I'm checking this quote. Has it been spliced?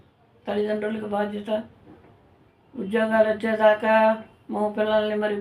no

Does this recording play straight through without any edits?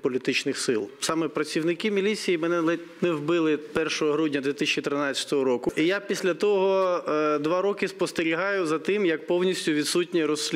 no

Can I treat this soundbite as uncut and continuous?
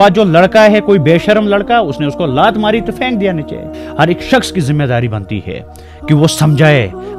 no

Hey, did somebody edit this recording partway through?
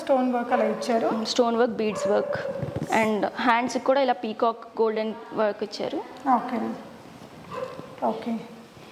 no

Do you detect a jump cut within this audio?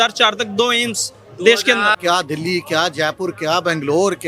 yes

